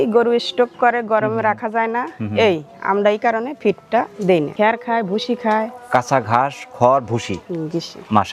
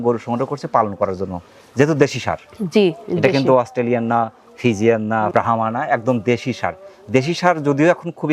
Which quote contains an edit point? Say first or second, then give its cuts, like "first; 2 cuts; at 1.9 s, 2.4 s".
first; 1 cut; at 4.5 s